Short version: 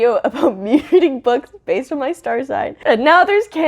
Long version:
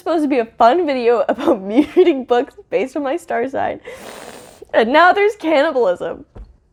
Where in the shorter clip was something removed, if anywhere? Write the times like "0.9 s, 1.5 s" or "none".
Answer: 2.8 s